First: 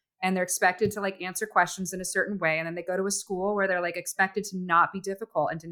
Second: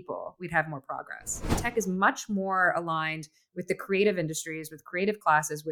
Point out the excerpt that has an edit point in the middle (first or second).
second